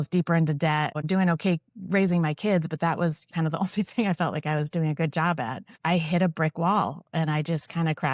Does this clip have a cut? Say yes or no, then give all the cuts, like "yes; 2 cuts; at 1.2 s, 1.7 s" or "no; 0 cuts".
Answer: yes; 3 cuts; at 1.0 s, 3.3 s, 5.6 s